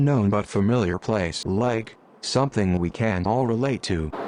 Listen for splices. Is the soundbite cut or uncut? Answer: uncut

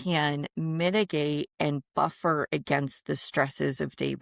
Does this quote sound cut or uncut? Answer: uncut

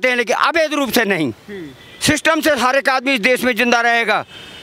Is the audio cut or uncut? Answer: uncut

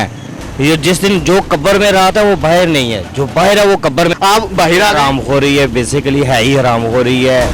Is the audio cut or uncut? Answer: cut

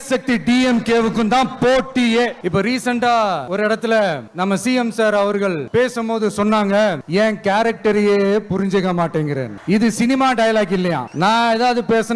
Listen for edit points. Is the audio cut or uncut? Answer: cut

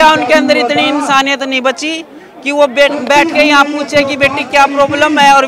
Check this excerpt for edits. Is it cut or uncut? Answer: uncut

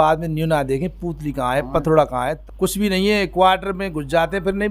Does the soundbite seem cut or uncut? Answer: cut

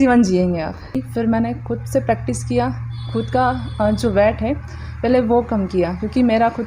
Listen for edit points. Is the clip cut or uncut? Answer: cut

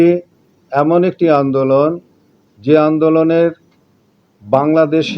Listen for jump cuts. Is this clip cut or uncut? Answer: uncut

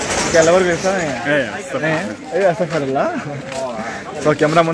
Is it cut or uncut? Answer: uncut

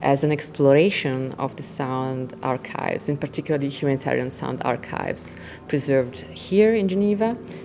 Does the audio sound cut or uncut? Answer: uncut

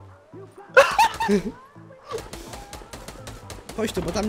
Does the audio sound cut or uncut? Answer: uncut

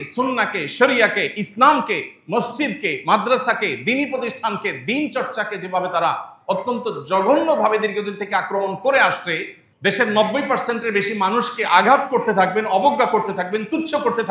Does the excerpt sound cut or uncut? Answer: cut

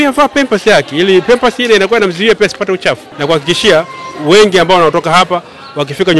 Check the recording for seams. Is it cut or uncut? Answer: cut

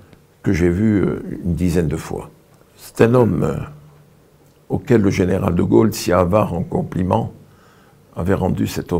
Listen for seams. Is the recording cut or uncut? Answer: uncut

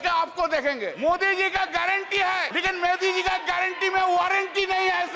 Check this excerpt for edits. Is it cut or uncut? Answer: cut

